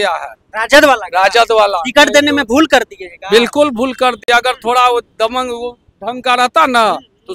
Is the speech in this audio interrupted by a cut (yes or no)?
no